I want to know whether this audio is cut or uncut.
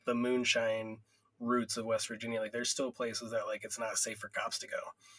uncut